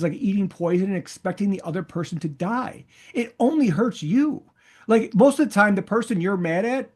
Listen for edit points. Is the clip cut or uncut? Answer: uncut